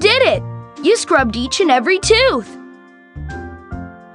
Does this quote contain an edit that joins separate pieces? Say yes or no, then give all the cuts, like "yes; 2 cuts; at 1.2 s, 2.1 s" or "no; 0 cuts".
yes; 1 cut; at 2.4 s